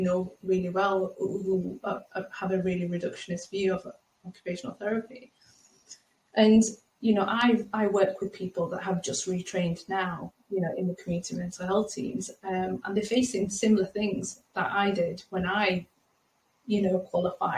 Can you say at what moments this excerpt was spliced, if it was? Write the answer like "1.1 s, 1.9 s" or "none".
none

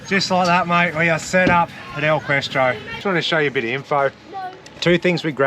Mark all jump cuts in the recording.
2.9 s

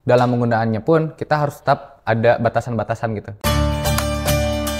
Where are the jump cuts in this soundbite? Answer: 3.4 s

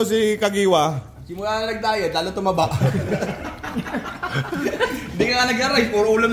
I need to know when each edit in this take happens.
none

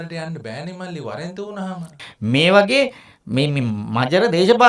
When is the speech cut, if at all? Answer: 2.0 s

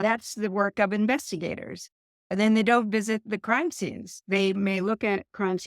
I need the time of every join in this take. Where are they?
2.2 s

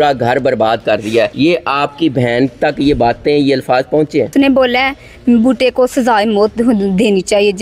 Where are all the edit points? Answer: 1.3 s, 4.3 s

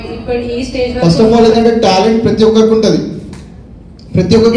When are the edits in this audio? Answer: 0.9 s

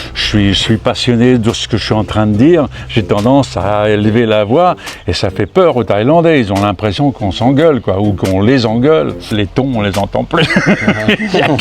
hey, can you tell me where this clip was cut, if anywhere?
9.2 s

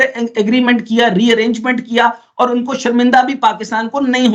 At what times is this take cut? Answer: none

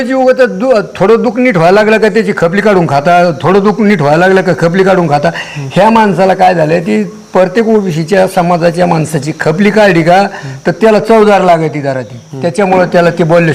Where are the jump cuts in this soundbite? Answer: none

